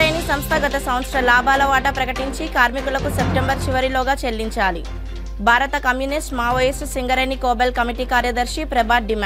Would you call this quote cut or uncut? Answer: uncut